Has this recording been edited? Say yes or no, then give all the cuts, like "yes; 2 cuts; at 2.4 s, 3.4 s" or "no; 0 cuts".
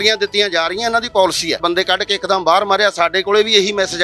yes; 1 cut; at 1.6 s